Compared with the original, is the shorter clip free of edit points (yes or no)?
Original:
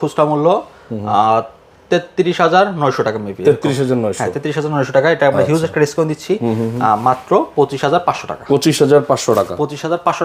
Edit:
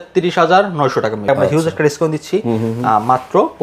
no